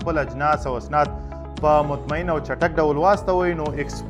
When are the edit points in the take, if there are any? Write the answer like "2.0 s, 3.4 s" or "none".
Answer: none